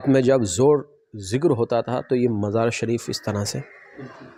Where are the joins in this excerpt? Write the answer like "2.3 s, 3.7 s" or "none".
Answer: none